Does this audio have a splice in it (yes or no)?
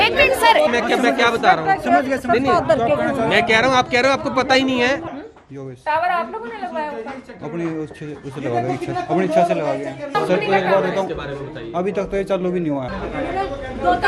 yes